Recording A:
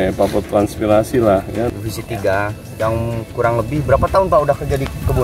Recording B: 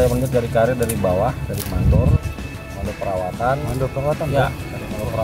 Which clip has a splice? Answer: A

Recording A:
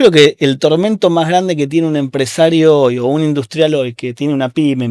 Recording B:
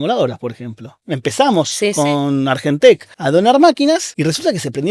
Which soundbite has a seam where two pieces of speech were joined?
B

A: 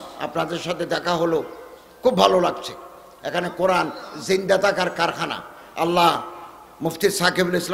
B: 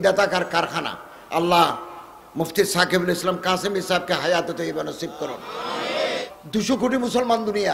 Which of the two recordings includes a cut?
B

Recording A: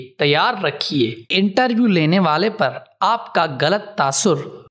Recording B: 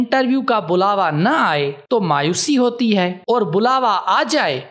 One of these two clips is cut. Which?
A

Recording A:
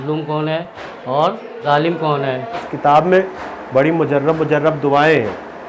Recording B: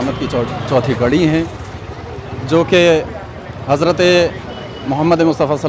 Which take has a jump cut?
A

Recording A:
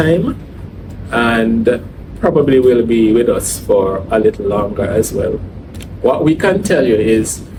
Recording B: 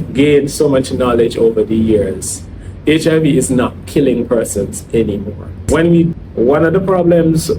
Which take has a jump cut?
B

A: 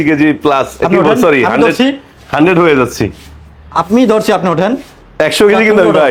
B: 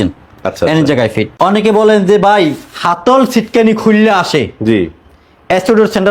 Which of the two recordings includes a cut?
B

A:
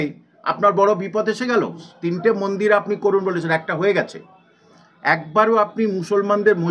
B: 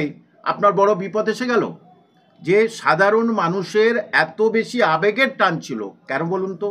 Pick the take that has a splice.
A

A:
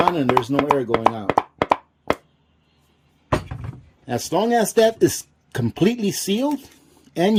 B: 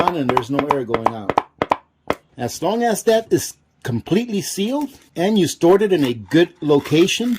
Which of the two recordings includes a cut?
B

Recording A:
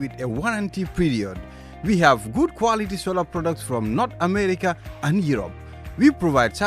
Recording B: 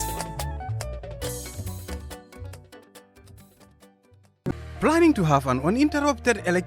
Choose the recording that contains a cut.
B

